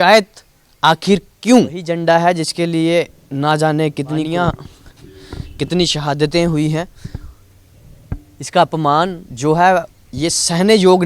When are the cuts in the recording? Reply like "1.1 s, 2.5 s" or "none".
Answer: 1.8 s, 4.3 s